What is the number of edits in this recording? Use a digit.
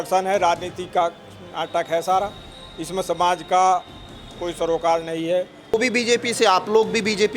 1